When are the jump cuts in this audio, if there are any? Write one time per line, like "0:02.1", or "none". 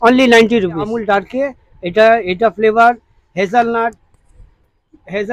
0:01.0